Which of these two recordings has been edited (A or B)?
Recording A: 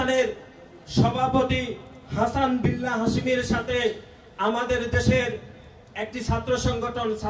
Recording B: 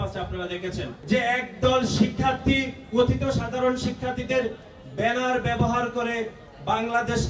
B